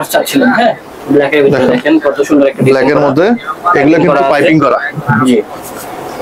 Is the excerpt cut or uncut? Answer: uncut